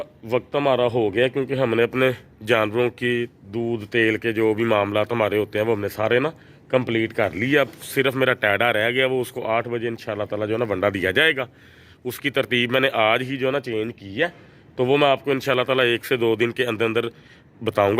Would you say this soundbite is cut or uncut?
uncut